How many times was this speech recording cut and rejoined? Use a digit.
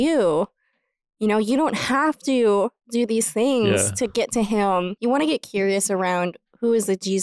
1